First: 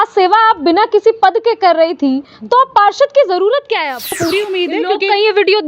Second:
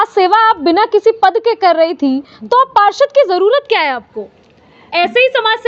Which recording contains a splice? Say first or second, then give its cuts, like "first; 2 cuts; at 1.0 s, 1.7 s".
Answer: first; 1 cut; at 4.2 s